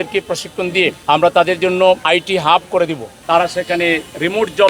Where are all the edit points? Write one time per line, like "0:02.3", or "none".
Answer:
0:01.0
0:02.0
0:03.1